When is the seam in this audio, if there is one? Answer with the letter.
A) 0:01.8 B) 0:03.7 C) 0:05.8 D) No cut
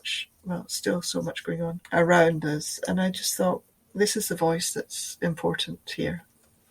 A